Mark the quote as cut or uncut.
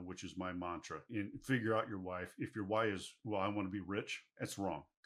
uncut